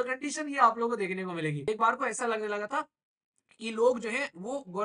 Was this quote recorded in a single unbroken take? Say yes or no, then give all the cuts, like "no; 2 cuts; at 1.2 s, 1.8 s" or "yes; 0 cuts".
no; 1 cut; at 1.6 s